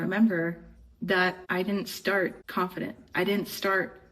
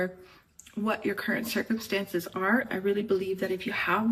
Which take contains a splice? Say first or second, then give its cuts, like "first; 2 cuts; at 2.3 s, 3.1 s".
first; 2 cuts; at 1.4 s, 2.4 s